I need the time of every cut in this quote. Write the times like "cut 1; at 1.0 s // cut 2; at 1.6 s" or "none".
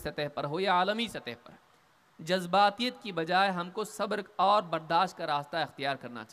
none